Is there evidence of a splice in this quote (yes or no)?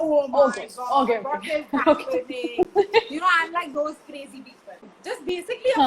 yes